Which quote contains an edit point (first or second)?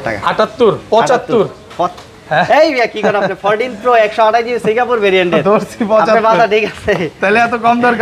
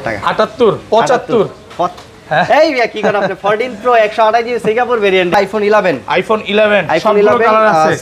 second